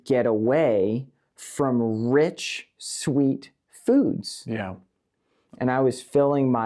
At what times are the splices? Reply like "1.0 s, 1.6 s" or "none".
none